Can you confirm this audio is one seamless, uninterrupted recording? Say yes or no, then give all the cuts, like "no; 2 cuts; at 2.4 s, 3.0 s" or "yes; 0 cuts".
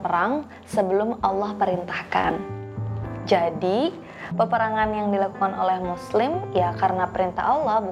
yes; 0 cuts